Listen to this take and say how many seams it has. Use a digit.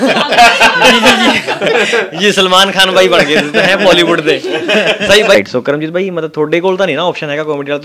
1